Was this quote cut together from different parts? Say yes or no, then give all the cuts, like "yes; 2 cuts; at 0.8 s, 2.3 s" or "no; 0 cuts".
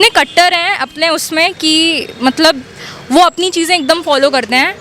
no; 0 cuts